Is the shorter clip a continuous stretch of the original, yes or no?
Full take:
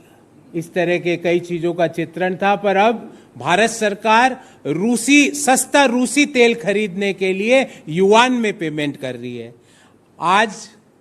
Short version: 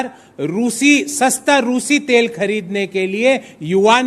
yes